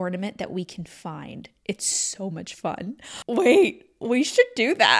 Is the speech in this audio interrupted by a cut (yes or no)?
no